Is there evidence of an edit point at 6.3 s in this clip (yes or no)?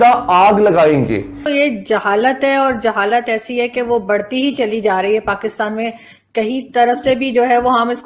no